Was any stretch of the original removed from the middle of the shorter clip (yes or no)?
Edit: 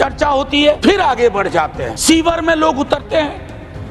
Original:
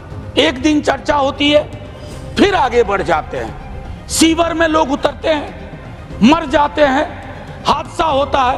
yes